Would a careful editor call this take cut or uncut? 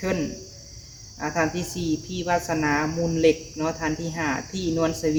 uncut